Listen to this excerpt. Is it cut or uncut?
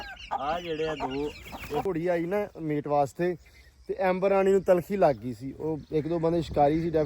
cut